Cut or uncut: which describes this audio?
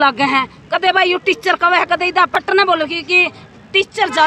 cut